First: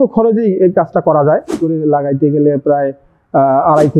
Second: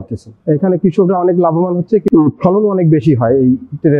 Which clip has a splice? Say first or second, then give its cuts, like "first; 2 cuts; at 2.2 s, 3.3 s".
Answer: first; 1 cut; at 1.6 s